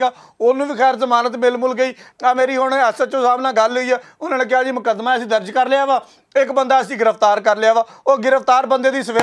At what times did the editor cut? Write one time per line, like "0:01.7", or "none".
0:02.1